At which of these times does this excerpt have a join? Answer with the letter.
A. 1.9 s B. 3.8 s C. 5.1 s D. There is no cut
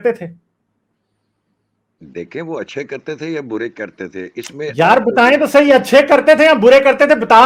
D